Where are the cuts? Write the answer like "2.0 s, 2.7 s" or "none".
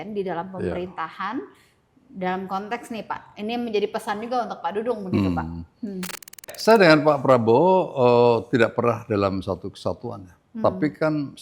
6.5 s

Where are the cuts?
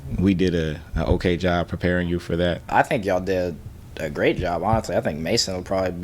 2.6 s

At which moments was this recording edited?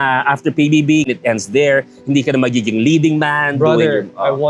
1.1 s

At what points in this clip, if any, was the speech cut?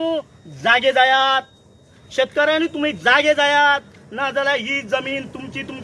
none

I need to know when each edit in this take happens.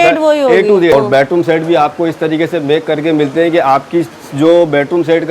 0.9 s

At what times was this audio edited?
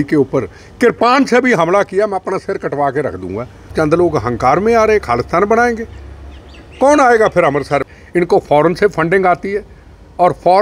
3.7 s, 7.8 s

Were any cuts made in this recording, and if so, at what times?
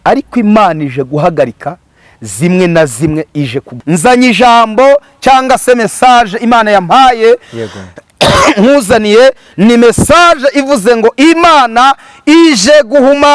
3.6 s

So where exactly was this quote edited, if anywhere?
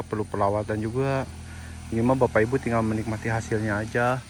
none

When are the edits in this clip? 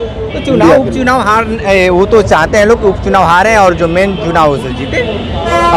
none

